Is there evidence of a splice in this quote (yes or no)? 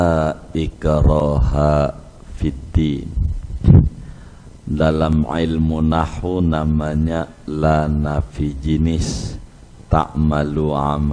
no